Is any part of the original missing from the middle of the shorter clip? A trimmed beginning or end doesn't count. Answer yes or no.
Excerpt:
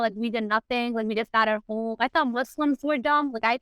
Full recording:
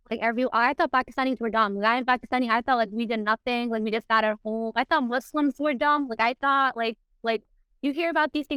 no